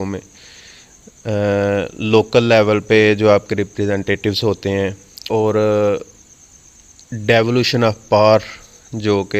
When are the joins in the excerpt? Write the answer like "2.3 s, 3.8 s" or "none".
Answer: 5.1 s